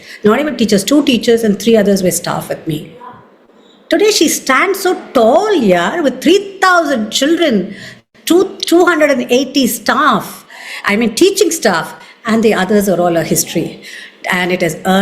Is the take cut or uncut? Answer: uncut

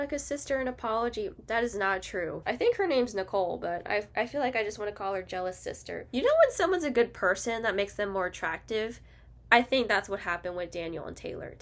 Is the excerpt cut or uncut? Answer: cut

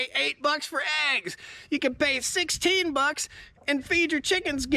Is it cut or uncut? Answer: uncut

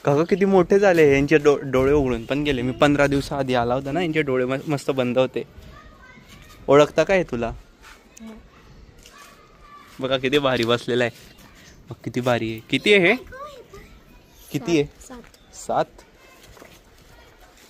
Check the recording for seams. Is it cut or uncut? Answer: uncut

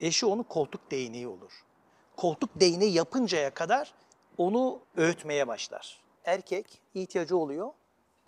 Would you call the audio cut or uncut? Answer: cut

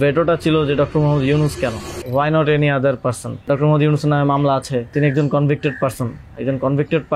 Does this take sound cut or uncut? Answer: cut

